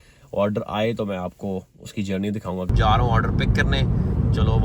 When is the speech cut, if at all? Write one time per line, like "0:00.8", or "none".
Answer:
0:02.7